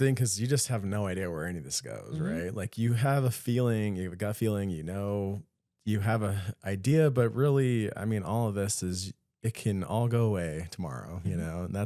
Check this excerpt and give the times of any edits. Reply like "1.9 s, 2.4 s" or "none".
none